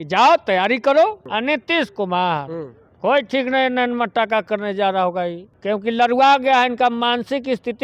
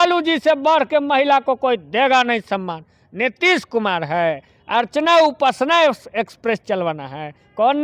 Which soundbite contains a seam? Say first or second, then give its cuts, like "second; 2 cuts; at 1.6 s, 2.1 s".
first; 2 cuts; at 1.3 s, 5.5 s